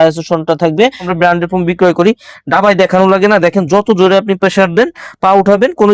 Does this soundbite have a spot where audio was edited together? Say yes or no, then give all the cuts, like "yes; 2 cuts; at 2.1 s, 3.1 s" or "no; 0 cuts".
yes; 1 cut; at 1.1 s